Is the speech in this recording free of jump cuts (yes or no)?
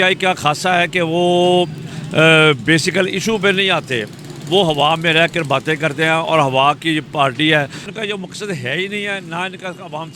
no